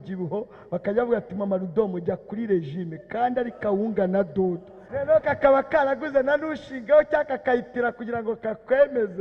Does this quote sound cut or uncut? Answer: cut